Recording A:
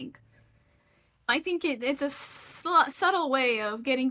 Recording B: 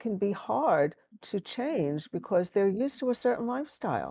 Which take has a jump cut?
A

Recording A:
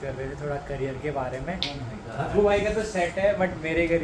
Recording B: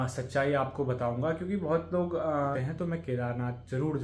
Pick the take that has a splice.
B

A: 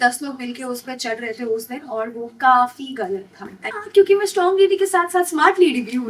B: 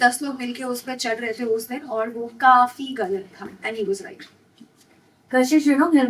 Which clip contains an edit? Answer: A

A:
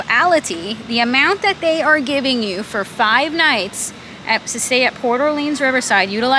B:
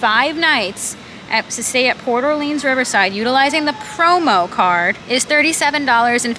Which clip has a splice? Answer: B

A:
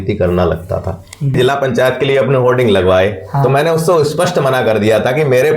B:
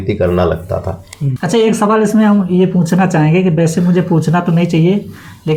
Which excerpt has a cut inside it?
A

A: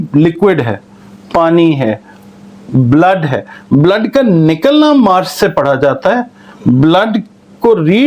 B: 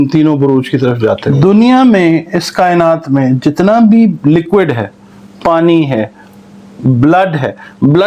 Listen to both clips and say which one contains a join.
B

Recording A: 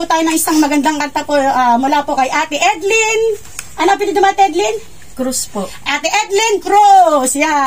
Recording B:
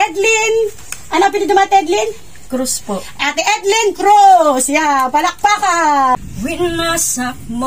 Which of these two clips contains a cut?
B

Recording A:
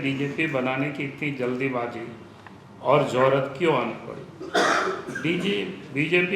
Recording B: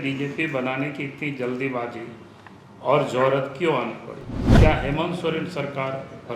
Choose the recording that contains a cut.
B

